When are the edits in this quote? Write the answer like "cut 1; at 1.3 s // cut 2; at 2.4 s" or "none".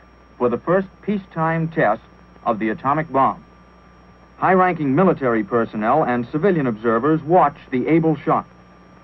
cut 1; at 6.8 s